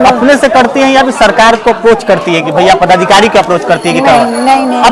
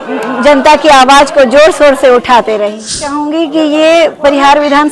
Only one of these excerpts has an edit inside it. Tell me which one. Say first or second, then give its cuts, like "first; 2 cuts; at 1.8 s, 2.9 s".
second; 1 cut; at 3.2 s